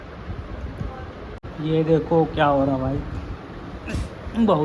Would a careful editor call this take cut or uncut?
cut